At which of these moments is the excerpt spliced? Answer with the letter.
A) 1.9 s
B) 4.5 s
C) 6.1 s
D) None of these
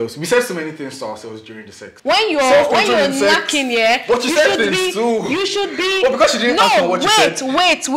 A